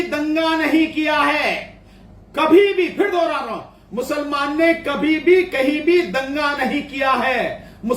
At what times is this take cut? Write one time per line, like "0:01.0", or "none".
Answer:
none

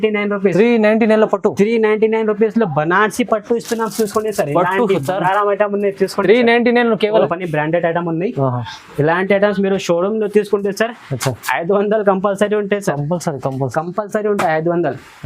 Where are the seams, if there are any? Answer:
0:07.3

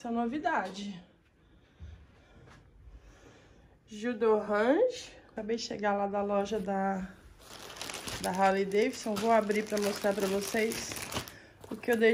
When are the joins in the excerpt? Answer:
0:05.4

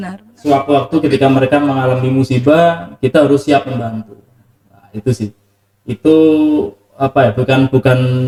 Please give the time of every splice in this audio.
none

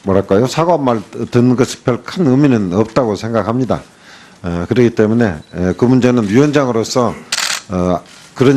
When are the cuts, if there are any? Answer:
0:04.9

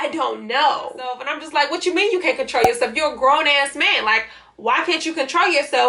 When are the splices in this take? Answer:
0:01.3

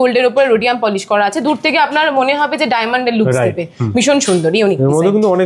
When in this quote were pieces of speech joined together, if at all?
none

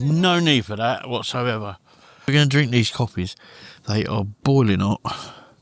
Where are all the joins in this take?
0:02.3

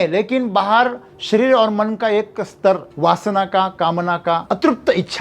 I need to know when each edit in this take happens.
0:02.9
0:04.4

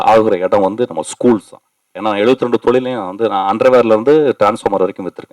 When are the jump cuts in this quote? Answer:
0:01.8

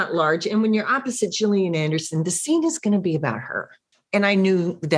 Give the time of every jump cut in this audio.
none

